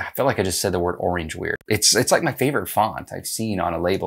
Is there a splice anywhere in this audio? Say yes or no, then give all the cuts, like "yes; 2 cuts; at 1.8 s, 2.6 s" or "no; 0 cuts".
yes; 1 cut; at 1.6 s